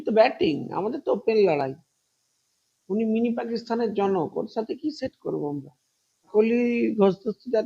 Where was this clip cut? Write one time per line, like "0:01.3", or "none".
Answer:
0:06.3

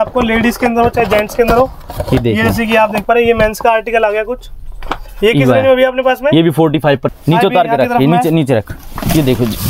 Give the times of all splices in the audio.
0:07.1

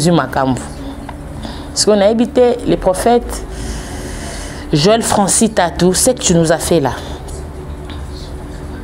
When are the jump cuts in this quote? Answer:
none

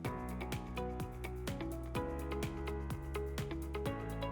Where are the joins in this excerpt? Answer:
none

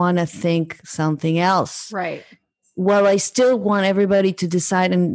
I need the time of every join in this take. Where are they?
none

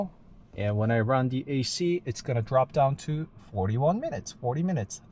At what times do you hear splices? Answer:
none

